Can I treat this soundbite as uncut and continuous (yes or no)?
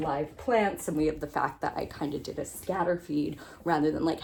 yes